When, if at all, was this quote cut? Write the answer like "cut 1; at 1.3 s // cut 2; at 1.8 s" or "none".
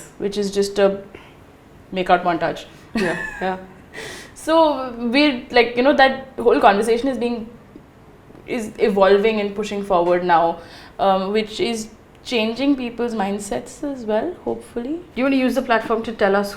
cut 1; at 15.1 s